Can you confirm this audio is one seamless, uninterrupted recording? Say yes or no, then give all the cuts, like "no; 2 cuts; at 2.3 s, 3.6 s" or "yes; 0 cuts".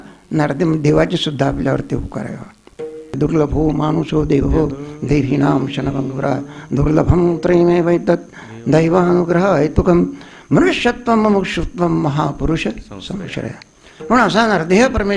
no; 1 cut; at 3.2 s